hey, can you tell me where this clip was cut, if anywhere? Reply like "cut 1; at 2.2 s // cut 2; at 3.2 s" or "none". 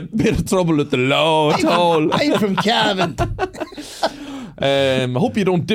none